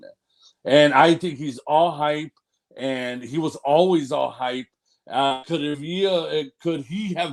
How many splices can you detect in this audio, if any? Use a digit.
0